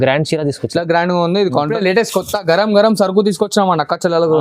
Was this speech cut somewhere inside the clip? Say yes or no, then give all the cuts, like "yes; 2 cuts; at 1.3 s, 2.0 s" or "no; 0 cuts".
yes; 1 cut; at 1.7 s